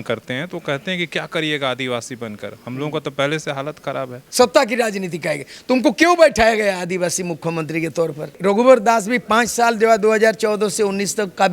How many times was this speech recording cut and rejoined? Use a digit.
2